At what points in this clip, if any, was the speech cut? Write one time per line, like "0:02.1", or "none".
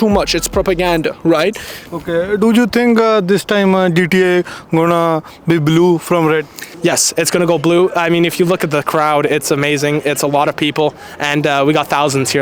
0:01.7
0:06.6

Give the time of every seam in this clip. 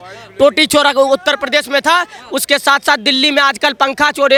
none

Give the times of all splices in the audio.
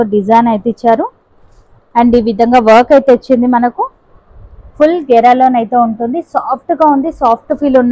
none

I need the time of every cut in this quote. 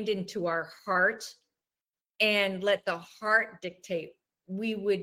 none

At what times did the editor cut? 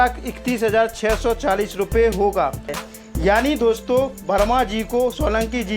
0:02.8

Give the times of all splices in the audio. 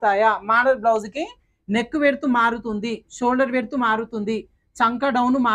none

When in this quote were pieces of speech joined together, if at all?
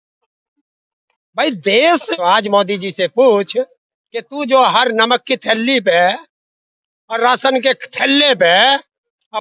0:02.1

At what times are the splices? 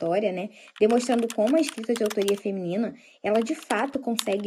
none

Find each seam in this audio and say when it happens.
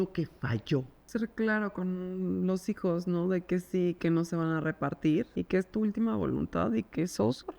0:01.0
0:04.0
0:05.3

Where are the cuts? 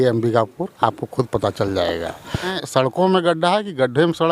0:02.6

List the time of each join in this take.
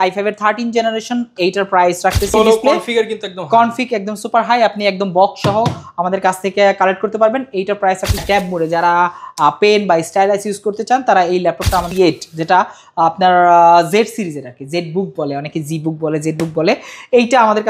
0:02.3
0:08.2
0:11.9

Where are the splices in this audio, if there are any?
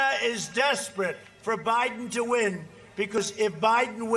0:03.2

